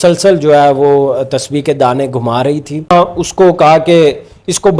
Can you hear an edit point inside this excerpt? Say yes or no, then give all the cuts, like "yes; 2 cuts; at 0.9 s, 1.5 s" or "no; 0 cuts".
yes; 1 cut; at 2.9 s